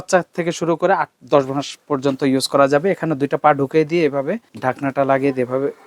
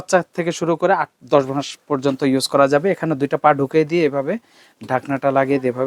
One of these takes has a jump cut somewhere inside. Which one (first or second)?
first